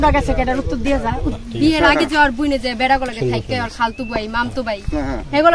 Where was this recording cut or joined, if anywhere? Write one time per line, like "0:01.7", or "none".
0:01.3